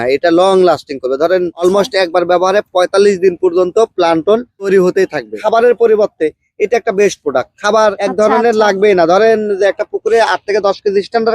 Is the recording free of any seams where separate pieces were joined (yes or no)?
no